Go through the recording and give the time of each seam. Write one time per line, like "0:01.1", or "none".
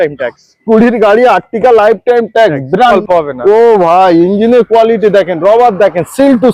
0:03.0